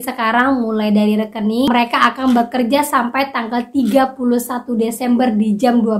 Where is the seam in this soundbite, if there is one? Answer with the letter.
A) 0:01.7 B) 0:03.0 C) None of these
A